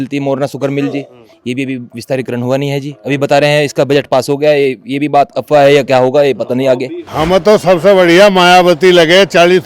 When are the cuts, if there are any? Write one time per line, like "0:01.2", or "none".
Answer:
0:06.9